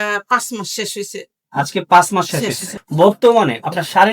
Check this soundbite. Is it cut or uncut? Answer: cut